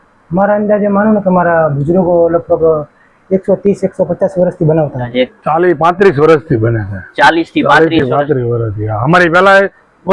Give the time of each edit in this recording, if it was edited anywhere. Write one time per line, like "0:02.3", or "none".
0:05.1

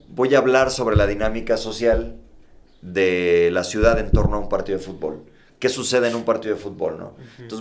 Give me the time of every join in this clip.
none

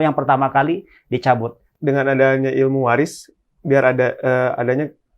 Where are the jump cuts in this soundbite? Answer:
0:01.7

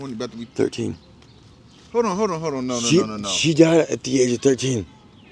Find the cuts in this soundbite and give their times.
none

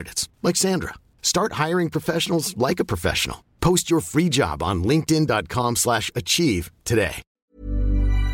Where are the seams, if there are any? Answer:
0:07.3

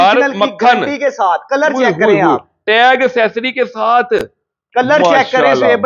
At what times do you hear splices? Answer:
none

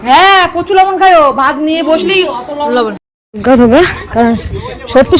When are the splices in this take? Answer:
0:03.2

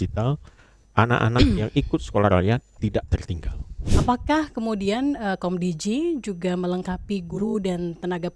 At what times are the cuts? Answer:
0:03.9

